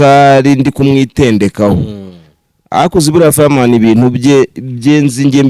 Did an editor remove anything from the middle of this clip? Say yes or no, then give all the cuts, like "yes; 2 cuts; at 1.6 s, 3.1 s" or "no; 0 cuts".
no; 0 cuts